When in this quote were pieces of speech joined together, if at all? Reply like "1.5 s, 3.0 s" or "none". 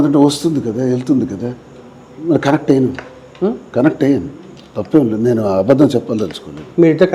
none

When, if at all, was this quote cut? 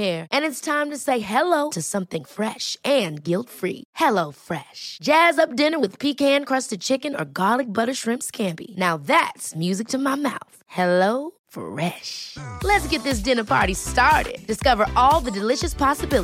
none

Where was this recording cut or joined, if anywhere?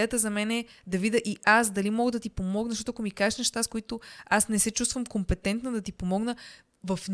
none

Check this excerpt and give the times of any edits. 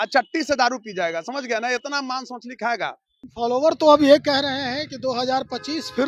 3.2 s

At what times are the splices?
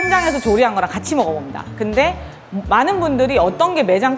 none

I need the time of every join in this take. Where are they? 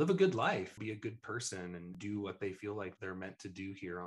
0.8 s, 1.9 s, 2.9 s

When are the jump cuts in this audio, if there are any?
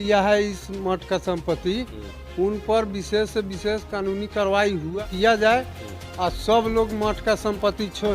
4.9 s

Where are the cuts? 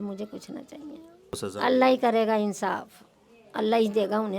1.5 s

